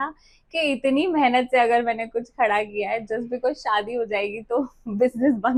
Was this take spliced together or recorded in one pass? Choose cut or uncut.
uncut